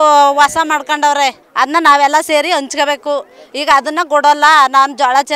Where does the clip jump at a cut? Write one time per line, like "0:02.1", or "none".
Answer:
0:01.4